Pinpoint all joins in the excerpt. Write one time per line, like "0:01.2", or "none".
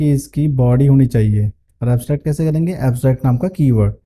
0:01.6